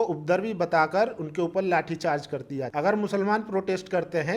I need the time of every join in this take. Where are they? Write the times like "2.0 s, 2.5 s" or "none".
2.7 s